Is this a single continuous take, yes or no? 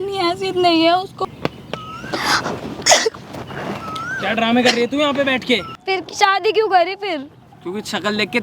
no